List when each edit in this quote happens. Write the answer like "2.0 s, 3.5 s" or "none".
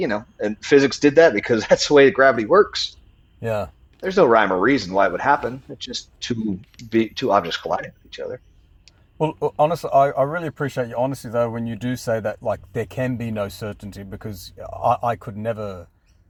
none